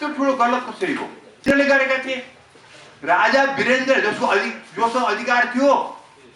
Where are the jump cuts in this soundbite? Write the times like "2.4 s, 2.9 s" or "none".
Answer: 1.5 s